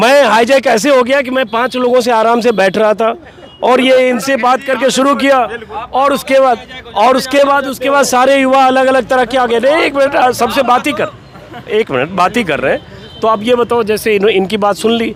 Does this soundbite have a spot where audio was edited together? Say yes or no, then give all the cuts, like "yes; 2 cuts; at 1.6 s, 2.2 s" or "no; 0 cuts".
no; 0 cuts